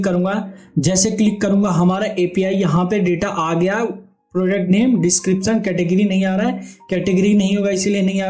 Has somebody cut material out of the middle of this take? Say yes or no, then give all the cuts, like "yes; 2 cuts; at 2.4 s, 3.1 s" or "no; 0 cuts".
no; 0 cuts